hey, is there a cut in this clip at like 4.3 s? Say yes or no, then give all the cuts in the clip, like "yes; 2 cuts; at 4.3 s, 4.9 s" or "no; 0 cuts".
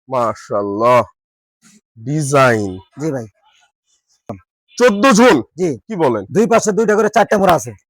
yes; 1 cut; at 4.3 s